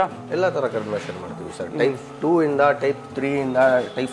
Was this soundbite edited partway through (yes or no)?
no